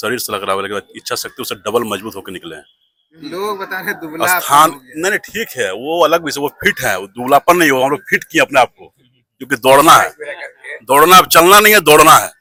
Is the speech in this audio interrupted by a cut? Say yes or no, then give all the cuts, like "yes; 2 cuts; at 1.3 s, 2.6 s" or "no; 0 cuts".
no; 0 cuts